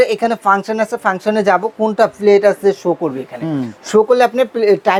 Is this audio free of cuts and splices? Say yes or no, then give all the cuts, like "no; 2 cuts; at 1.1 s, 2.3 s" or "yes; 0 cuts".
yes; 0 cuts